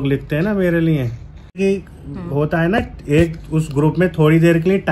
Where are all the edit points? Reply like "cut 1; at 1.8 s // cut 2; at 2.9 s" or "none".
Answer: cut 1; at 1.6 s